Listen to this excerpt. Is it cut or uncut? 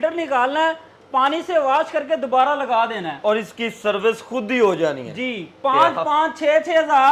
uncut